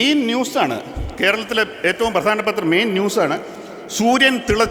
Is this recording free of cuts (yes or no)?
yes